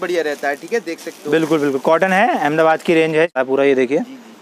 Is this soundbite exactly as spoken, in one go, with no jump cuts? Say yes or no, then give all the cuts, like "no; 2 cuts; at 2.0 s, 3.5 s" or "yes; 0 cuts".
no; 1 cut; at 3.3 s